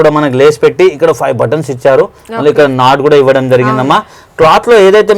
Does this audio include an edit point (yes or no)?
no